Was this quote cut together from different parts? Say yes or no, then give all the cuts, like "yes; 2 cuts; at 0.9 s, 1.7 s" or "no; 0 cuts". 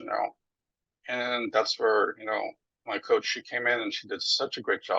no; 0 cuts